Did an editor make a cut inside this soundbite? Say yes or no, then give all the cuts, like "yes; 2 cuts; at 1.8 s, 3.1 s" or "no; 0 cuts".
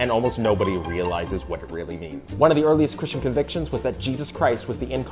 yes; 1 cut; at 2.6 s